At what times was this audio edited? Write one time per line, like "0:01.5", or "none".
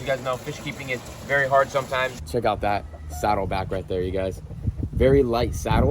0:02.2